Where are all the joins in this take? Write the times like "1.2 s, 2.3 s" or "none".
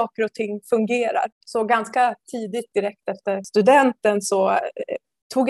1.4 s, 3.4 s